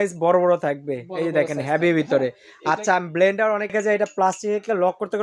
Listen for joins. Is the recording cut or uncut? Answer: cut